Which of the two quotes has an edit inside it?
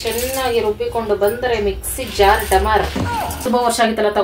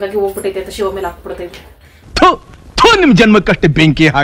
first; 1 cut; at 3.4 s

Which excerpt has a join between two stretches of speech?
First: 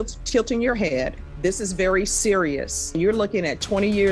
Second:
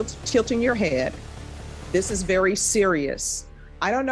first; 2 cuts; at 1.2 s, 3.0 s

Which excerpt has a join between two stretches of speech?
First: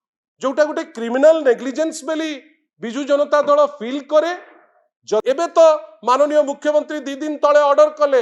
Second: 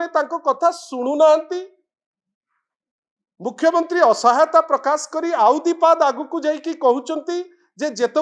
first; 1 cut; at 5.2 s

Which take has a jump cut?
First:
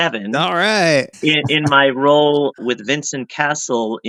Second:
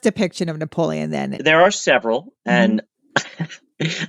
second; 1 cut; at 1.4 s

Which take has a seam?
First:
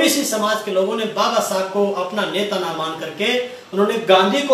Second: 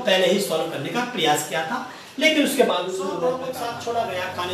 second; 1 cut; at 3.1 s

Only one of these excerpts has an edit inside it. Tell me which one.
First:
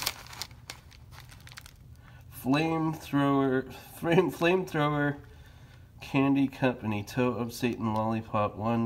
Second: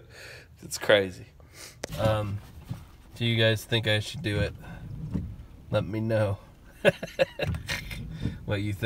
second; 1 cut; at 1.9 s

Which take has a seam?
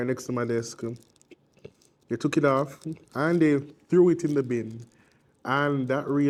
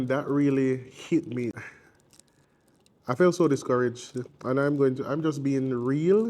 second; 1 cut; at 1.5 s

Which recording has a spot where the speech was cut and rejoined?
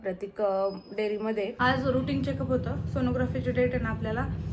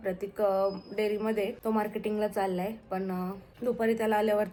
first; 1 cut; at 1.5 s

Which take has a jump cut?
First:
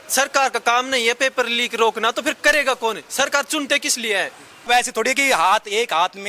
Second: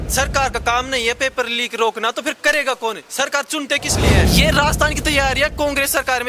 second; 1 cut; at 4.3 s

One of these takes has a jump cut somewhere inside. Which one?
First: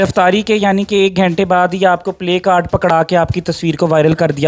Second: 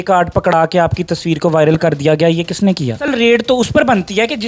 second; 1 cut; at 3.0 s

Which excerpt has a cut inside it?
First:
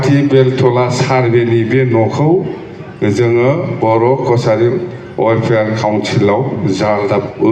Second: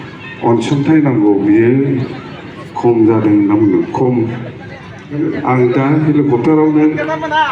second; 1 cut; at 5.2 s

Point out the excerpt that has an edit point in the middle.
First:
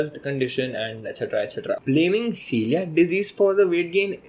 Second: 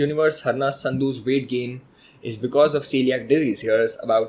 first; 1 cut; at 1.8 s

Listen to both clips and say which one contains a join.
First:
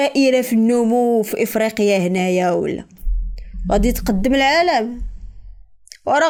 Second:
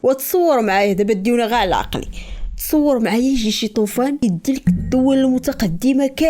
second; 1 cut; at 4.2 s

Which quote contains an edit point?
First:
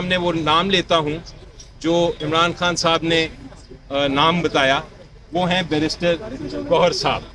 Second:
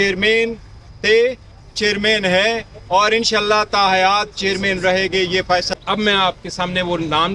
second; 1 cut; at 5.7 s

